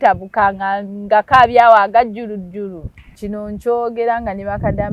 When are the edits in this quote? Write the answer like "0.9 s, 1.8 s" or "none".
3.3 s